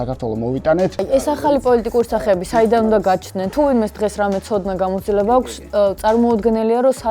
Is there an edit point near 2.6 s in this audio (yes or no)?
no